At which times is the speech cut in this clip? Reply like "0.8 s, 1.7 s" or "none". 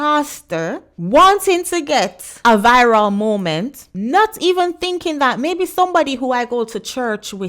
0.9 s, 2.2 s, 3.8 s

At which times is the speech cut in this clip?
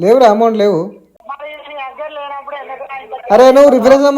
1.1 s

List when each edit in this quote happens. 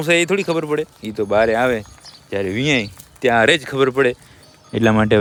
none

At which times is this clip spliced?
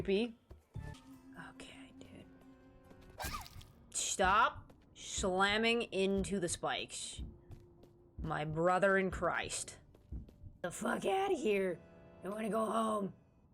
1.0 s, 10.6 s

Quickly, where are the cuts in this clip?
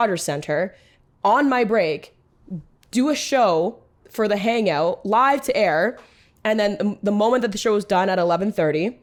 none

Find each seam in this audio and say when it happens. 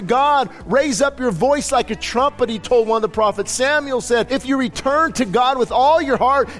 4.3 s

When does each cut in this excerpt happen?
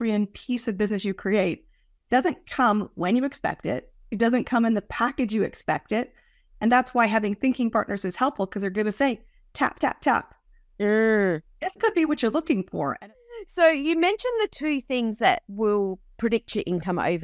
13.0 s

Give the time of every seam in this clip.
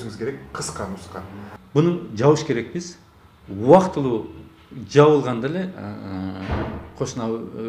1.5 s

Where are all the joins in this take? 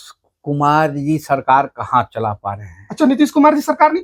none

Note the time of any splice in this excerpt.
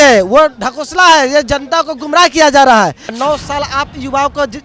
3.1 s

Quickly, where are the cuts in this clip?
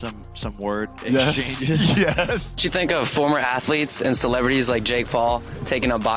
2.7 s

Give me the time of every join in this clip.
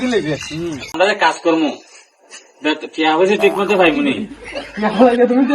1.0 s

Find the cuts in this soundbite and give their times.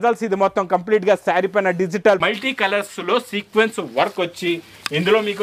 2.2 s

